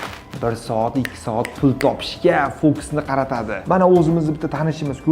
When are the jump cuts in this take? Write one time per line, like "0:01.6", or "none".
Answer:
0:03.5